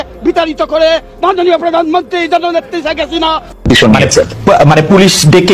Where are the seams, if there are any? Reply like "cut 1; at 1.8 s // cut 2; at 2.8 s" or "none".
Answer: cut 1; at 3.5 s